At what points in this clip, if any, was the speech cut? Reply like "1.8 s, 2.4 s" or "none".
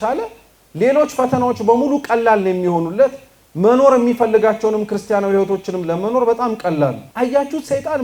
7.0 s